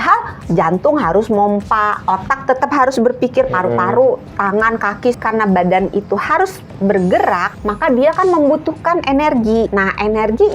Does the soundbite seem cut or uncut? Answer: cut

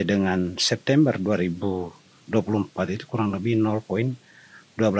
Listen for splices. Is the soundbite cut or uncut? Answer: uncut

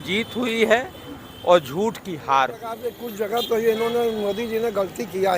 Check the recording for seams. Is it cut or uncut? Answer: cut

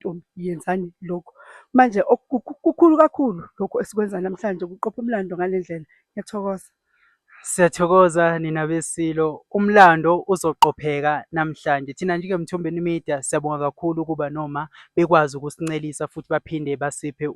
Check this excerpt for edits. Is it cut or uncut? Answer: uncut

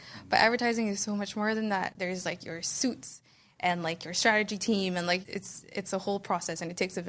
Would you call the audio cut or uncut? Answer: cut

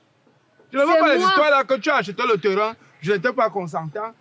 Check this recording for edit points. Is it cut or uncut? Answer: uncut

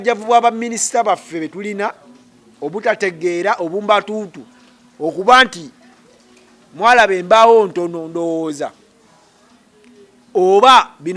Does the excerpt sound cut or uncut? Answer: uncut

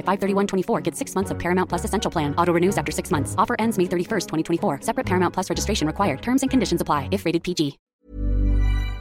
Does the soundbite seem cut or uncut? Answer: cut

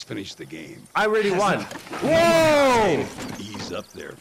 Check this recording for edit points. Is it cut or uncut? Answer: uncut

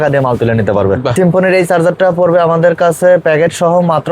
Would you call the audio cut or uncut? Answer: cut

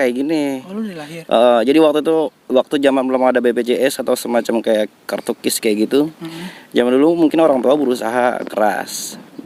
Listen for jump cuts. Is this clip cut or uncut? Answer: uncut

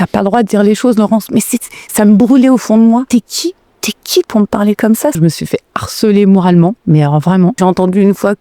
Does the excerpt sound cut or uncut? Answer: cut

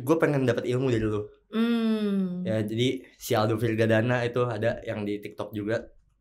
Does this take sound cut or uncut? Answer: uncut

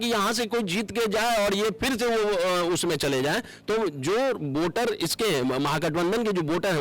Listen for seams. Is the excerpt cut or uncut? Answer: uncut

